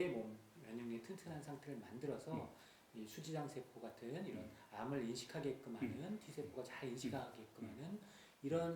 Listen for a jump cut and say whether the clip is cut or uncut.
uncut